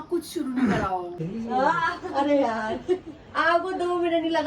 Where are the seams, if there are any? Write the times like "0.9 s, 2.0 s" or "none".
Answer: 1.2 s